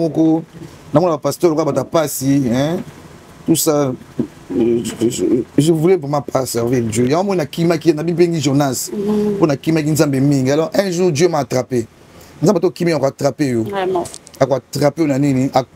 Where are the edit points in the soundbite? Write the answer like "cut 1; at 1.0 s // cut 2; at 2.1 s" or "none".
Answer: none